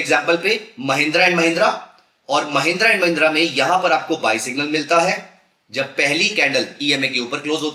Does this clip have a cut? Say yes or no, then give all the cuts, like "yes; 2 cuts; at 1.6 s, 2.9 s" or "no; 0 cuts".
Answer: no; 0 cuts